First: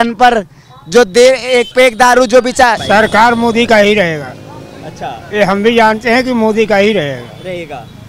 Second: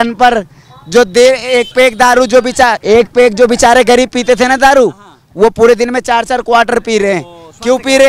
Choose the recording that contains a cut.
first; 1 cut; at 2.8 s

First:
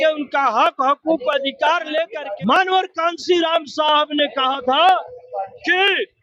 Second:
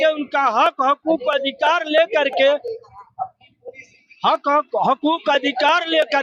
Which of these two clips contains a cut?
first; 1 cut; at 2.1 s

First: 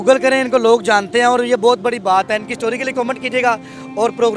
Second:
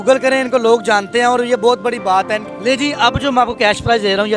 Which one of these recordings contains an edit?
second; 1 cut; at 2.5 s

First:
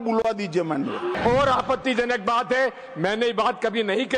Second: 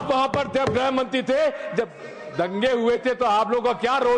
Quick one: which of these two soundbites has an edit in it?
first; 1 cut; at 1.1 s

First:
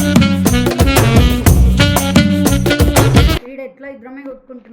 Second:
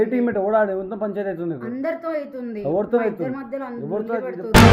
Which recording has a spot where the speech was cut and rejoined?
first; 1 cut; at 3.4 s

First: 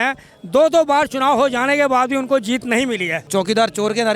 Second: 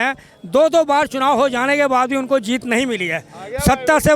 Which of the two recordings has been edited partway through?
first; 1 cut; at 3.2 s

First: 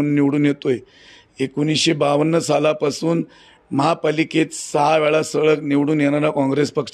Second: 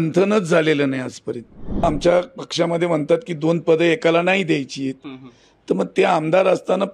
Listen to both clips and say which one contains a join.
second; 1 cut; at 1.8 s

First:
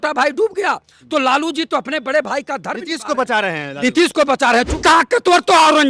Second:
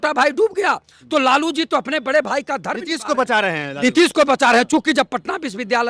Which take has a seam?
first; 1 cut; at 4.7 s

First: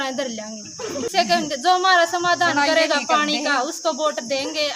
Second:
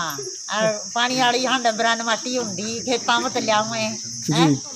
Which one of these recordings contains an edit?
first; 1 cut; at 1.0 s

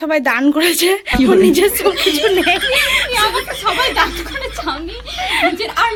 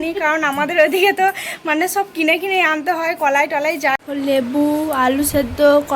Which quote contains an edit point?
second; 1 cut; at 3.9 s

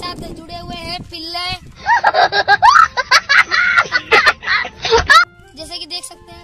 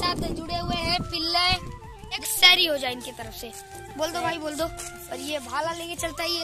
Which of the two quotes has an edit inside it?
second; 2 cuts; at 1.7 s, 4.9 s

